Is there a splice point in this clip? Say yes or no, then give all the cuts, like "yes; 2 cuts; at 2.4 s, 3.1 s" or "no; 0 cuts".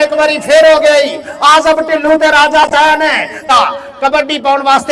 yes; 1 cut; at 3.5 s